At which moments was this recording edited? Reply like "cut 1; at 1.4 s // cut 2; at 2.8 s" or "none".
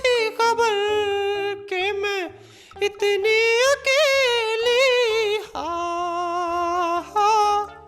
none